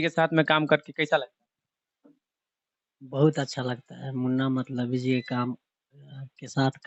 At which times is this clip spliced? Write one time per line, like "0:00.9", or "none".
none

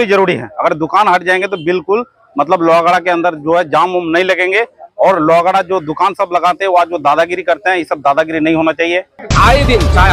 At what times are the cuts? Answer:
0:09.2

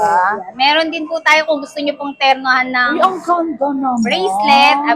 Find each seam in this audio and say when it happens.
none

